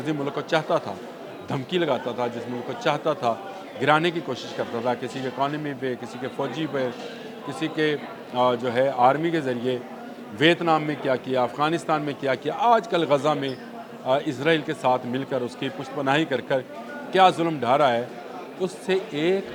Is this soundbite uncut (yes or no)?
yes